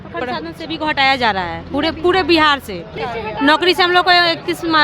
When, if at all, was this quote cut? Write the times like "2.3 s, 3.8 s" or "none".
3.0 s